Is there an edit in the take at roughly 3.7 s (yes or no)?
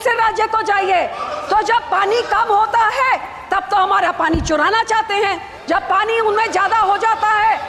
no